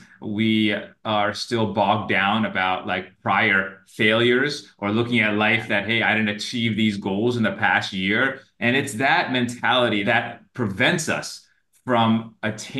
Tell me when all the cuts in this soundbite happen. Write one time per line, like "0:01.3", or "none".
0:08.5
0:10.0